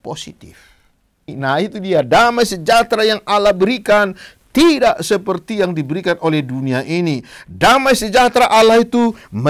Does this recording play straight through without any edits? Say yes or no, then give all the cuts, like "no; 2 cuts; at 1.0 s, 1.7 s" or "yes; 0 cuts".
no; 1 cut; at 1.3 s